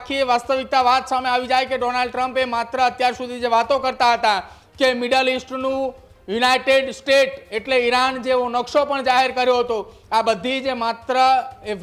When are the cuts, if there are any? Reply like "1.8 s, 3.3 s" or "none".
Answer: none

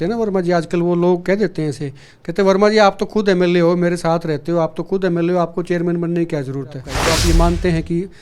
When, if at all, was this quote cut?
6.9 s

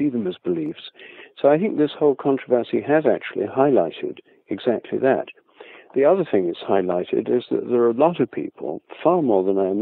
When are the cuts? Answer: none

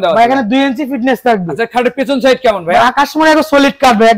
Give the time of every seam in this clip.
none

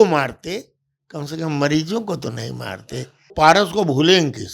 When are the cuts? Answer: 3.3 s

